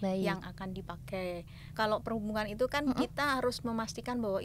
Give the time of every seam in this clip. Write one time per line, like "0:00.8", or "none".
0:01.8